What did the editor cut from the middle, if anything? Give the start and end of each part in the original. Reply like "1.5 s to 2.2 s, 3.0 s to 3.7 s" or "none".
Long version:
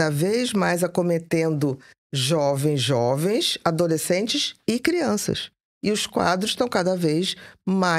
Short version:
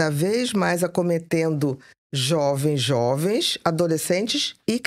none